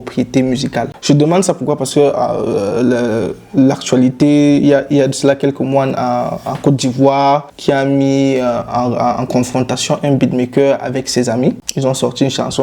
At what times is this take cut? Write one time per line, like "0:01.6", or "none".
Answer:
0:00.9
0:07.5
0:11.7